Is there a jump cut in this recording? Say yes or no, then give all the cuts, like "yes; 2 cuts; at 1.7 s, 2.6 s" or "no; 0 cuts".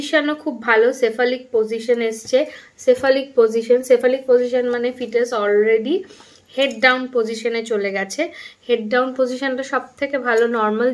no; 0 cuts